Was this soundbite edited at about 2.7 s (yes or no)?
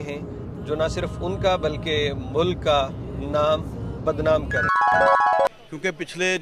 no